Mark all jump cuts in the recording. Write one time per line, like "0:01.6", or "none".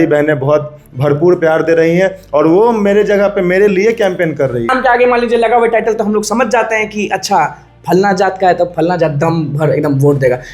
0:04.7